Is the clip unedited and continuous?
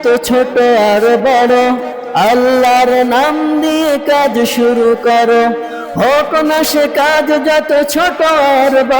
yes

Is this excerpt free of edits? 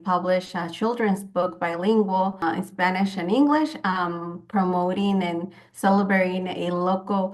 no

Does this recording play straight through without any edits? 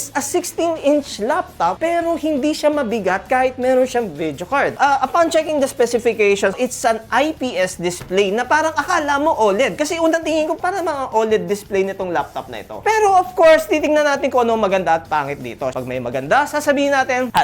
no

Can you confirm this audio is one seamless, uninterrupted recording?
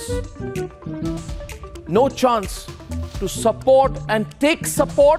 yes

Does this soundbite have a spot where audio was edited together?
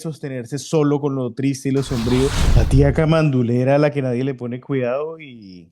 yes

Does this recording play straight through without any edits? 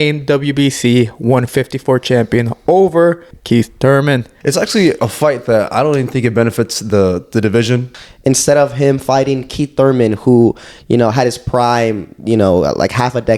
no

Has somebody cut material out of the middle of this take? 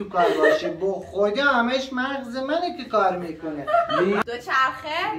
yes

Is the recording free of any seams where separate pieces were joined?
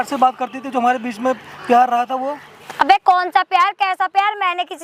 yes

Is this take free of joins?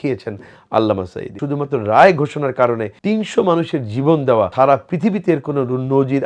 no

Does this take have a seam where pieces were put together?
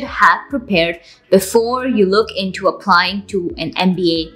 no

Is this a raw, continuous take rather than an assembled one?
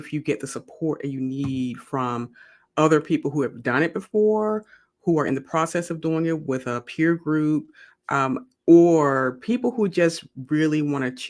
yes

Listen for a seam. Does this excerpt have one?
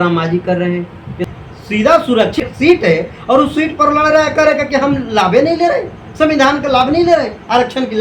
yes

